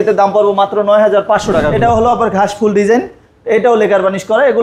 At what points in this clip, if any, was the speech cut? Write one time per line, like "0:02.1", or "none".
0:01.7

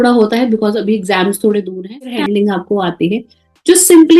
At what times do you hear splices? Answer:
0:01.9

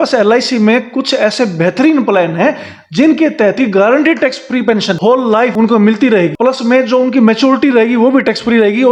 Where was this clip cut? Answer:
none

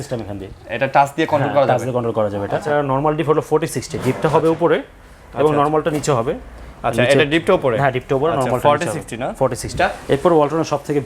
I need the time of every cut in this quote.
0:02.7
0:09.8

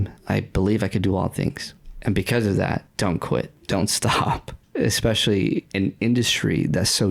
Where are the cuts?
none

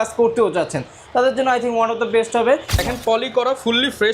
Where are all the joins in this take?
0:02.8

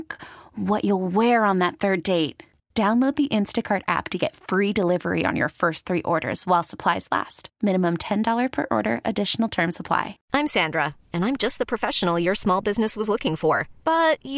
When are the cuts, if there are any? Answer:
0:10.2

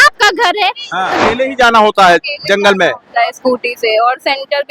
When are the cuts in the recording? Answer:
0:01.2

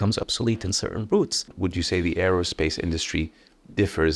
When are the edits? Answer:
0:01.5

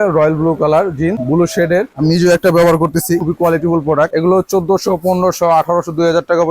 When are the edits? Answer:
0:01.6
0:03.2
0:04.1

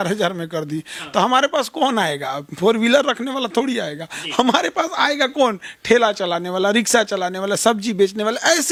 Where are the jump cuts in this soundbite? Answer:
none

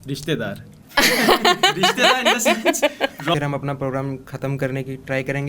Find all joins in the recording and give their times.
0:03.3

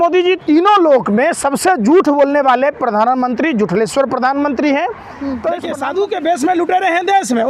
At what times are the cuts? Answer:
0:05.2

